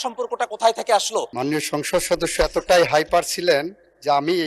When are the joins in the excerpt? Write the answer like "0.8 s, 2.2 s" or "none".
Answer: 1.3 s